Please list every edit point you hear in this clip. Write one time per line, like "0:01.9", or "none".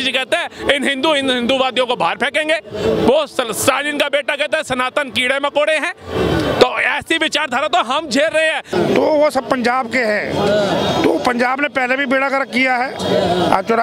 0:08.7